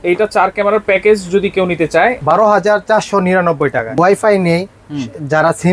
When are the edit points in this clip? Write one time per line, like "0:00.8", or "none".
0:02.2
0:03.9